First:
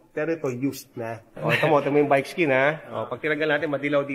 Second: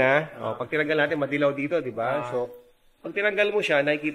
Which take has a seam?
first; 1 cut; at 1.3 s

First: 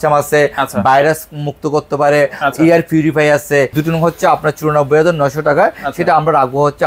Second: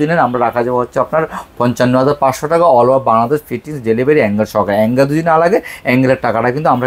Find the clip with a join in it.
first; 1 cut; at 3.7 s

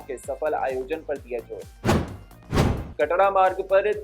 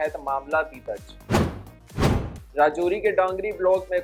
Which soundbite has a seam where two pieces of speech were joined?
first; 2 cuts; at 1.6 s, 2.8 s

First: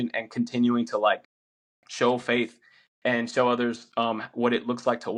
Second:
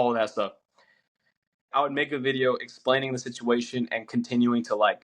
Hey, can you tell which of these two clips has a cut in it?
second; 1 cut; at 1.7 s

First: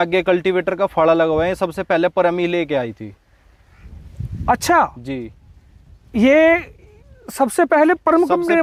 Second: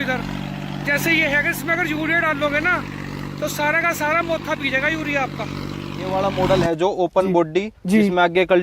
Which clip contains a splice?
second; 1 cut; at 6.1 s

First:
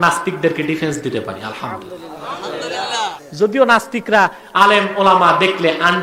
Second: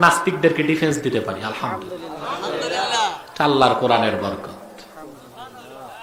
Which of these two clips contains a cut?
first; 1 cut; at 3.2 s

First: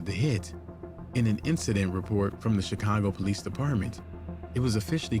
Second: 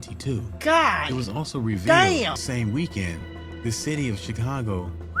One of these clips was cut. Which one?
second; 1 cut; at 2.4 s

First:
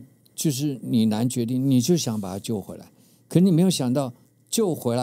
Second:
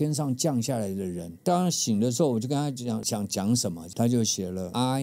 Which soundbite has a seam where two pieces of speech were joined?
second; 2 cuts; at 1.4 s, 3.0 s

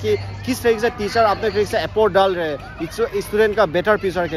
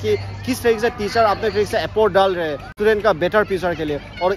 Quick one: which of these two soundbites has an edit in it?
second; 1 cut; at 2.7 s

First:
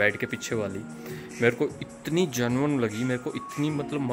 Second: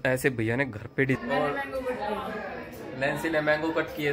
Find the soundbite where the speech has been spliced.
second; 1 cut; at 1.2 s

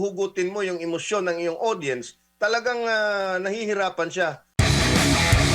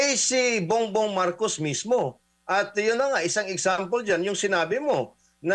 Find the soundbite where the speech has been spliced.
first; 1 cut; at 4.5 s

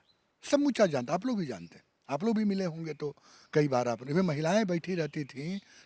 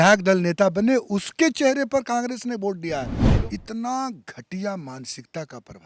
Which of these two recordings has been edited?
second; 1 cut; at 3.2 s

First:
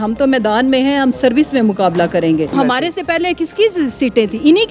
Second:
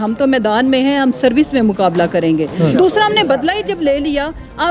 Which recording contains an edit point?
first; 1 cut; at 2.5 s

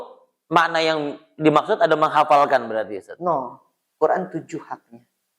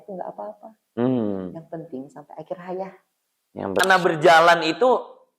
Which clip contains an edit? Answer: second; 1 cut; at 3.8 s

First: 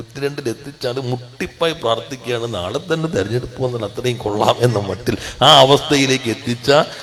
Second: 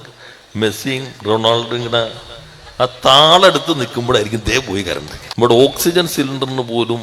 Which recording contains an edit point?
second; 1 cut; at 5.2 s

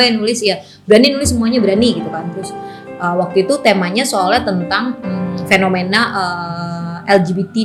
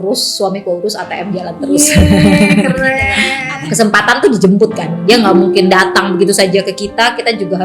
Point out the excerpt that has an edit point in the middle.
second; 1 cut; at 3.3 s

